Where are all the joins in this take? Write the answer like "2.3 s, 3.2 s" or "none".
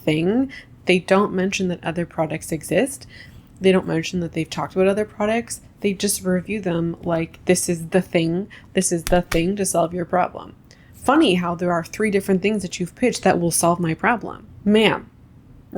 14.5 s